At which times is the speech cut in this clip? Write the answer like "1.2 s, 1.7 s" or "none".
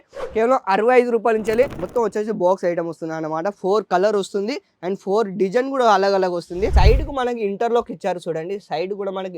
1.8 s, 6.7 s